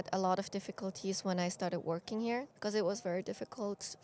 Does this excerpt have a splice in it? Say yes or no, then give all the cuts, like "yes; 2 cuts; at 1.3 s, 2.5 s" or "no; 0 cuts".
yes; 1 cut; at 2.5 s